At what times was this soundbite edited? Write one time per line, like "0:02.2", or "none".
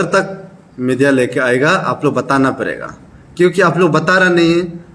none